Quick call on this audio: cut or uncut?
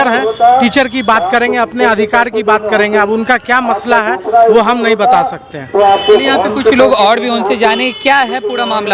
uncut